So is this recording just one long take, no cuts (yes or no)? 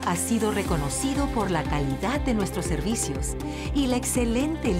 yes